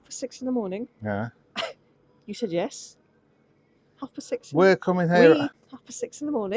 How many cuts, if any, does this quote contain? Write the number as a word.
one